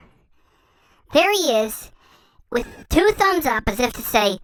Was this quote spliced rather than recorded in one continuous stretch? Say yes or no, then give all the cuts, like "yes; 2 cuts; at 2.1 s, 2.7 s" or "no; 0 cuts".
no; 0 cuts